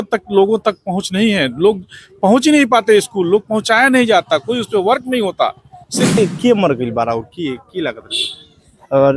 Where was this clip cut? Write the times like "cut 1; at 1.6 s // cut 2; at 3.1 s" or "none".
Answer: cut 1; at 6.2 s